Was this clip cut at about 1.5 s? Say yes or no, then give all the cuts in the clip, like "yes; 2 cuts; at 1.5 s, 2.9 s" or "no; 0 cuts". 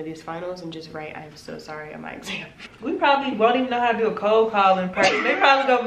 no; 1 cut; at 2.7 s